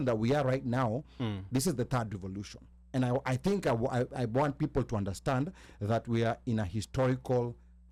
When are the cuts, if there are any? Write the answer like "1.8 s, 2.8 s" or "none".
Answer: none